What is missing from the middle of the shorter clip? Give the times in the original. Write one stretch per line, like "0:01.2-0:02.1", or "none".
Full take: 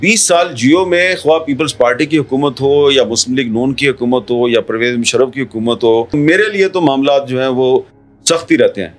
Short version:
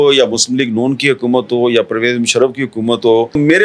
none